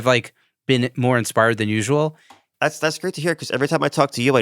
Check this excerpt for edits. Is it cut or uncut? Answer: cut